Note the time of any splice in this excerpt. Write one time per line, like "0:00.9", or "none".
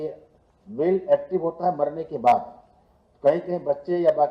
0:02.3